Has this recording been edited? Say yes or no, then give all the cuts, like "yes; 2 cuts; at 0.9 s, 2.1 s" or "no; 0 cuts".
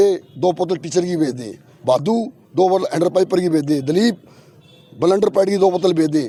no; 0 cuts